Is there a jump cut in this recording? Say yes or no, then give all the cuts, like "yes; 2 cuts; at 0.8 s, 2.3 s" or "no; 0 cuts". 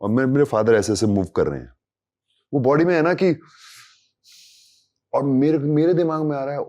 no; 0 cuts